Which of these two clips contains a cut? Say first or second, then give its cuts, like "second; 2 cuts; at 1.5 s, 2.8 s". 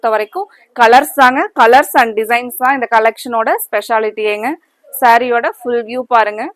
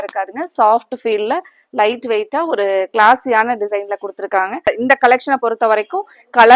second; 1 cut; at 4.7 s